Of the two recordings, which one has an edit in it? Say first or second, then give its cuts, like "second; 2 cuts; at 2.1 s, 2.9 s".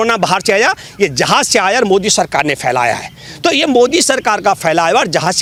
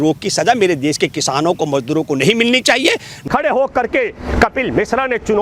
second; 1 cut; at 3.2 s